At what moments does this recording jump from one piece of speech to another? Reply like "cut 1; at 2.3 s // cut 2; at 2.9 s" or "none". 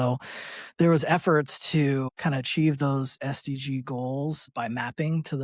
cut 1; at 2.1 s // cut 2; at 4.5 s

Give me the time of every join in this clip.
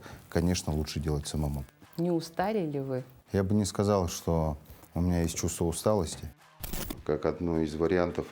cut 1; at 1.6 s // cut 2; at 3.1 s // cut 3; at 6.7 s

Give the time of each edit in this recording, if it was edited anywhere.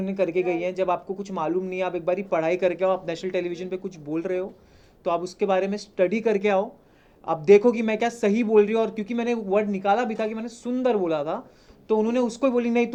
none

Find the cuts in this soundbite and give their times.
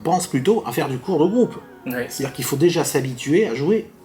none

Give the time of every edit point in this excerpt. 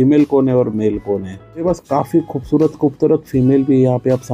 cut 1; at 1.6 s

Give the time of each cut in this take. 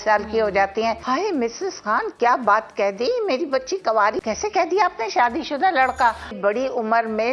cut 1; at 1.0 s // cut 2; at 4.2 s // cut 3; at 6.4 s

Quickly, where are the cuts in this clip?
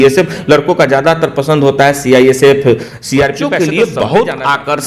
cut 1; at 3.4 s

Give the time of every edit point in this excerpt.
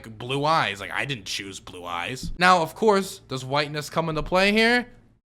cut 1; at 2.3 s

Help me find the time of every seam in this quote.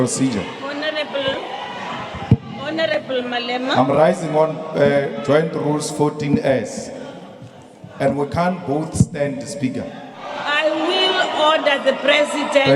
none

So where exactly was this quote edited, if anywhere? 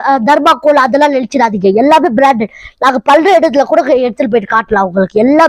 none

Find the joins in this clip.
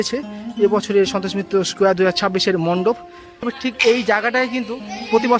cut 1; at 3.5 s

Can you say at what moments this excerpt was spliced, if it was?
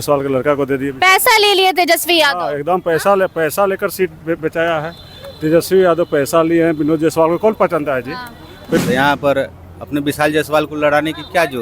cut 1; at 8.8 s

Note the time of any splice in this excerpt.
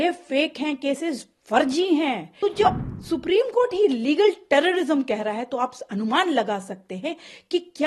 cut 1; at 2.3 s

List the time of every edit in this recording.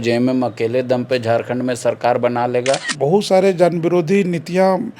cut 1; at 2.9 s

